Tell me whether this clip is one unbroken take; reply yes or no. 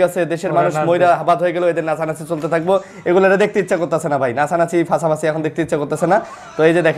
yes